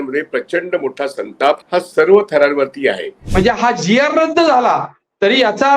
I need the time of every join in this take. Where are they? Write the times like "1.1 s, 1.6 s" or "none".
1.6 s, 3.2 s